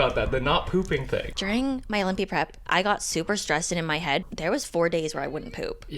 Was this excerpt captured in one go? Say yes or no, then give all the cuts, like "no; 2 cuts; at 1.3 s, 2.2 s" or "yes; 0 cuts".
no; 2 cuts; at 1.3 s, 4.3 s